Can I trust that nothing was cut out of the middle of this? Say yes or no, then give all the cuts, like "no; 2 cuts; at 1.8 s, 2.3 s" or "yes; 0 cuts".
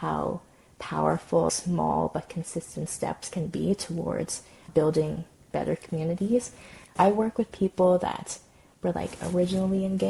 yes; 0 cuts